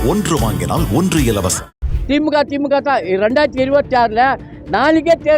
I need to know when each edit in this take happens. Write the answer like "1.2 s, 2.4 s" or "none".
1.9 s